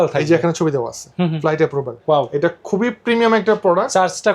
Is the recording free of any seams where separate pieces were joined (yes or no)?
no